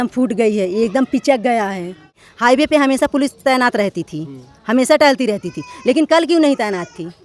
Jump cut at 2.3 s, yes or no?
yes